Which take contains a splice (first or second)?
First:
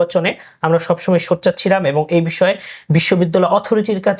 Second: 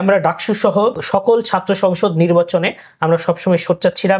second